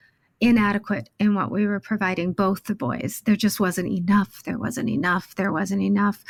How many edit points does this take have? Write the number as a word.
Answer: zero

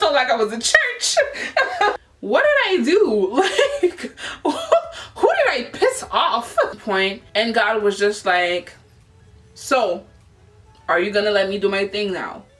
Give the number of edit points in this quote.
two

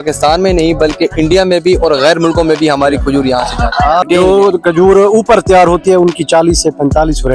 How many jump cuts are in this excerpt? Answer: one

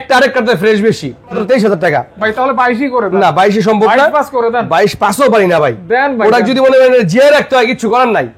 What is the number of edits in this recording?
one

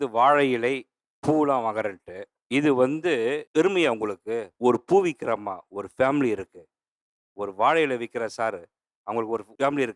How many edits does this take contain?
zero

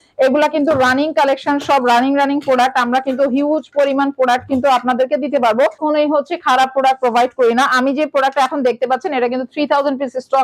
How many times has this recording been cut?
one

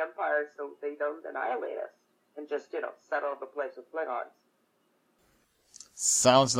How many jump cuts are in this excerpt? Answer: one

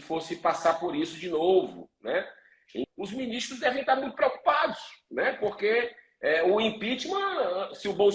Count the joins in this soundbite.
one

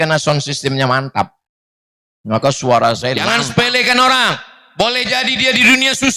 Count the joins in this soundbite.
one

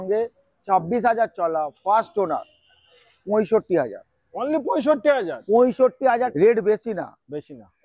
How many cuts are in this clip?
one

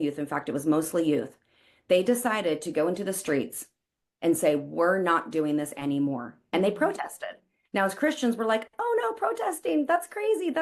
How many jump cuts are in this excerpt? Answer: zero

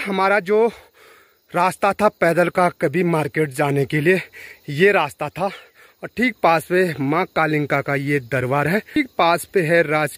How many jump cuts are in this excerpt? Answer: one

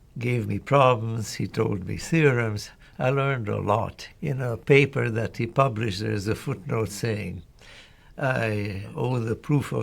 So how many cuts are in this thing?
two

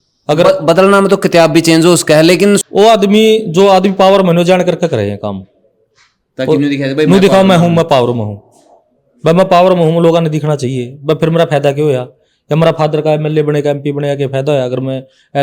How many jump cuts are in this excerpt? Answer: one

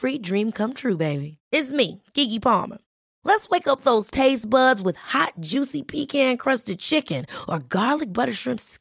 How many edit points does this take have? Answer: zero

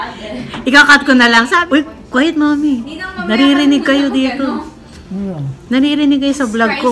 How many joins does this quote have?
one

